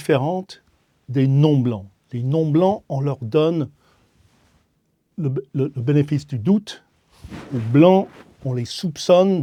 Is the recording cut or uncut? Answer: uncut